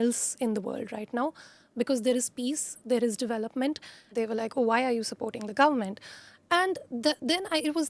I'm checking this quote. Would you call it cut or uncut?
cut